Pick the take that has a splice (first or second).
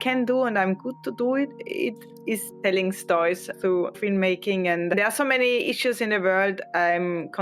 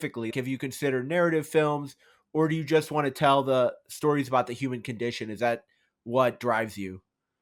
first